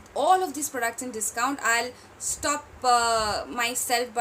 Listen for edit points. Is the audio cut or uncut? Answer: uncut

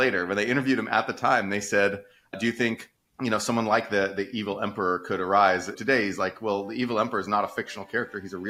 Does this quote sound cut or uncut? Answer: uncut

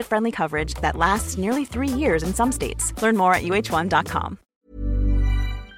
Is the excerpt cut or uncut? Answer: cut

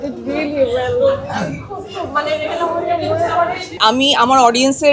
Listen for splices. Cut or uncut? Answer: cut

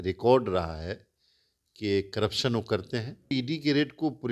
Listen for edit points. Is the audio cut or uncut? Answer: cut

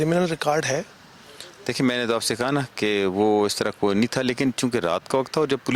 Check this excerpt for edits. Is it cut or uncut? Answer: uncut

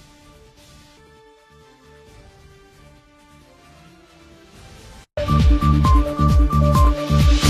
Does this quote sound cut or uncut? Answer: cut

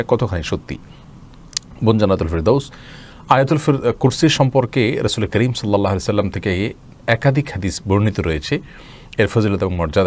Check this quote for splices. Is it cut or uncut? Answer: uncut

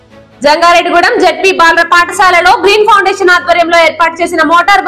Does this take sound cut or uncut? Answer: uncut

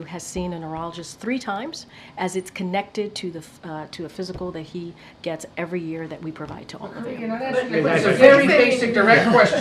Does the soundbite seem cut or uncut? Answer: uncut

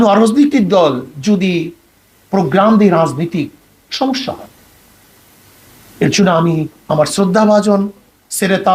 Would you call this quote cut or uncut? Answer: uncut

